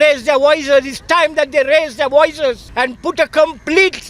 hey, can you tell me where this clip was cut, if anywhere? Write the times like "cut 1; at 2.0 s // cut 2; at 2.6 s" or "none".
cut 1; at 2.7 s

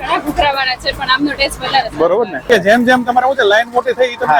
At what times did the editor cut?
cut 1; at 2.5 s

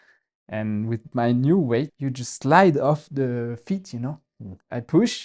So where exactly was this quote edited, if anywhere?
cut 1; at 1.9 s

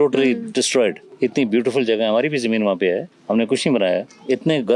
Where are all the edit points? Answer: none

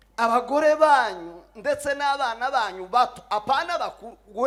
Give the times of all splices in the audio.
none

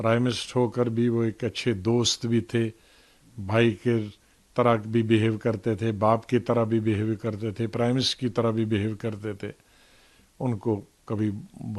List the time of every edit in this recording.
none

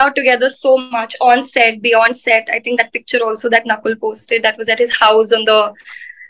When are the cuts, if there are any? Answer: none

